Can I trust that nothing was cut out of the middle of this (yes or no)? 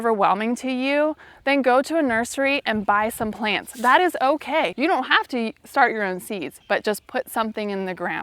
no